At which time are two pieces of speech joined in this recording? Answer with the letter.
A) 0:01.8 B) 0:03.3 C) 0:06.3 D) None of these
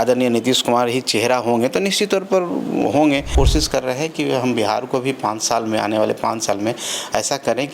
B